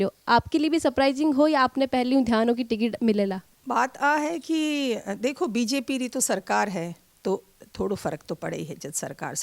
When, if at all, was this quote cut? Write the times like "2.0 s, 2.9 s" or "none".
3.5 s